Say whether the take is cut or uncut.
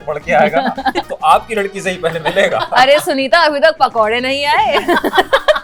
uncut